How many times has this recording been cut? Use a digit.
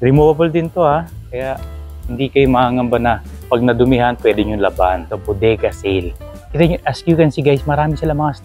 1